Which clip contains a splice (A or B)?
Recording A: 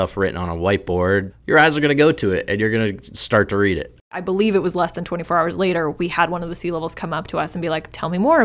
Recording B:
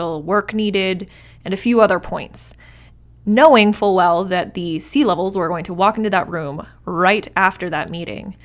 A